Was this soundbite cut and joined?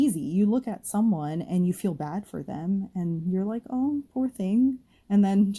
no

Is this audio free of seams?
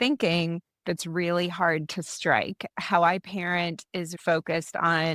no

